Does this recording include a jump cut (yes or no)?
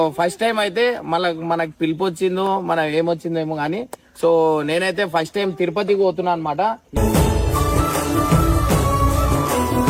no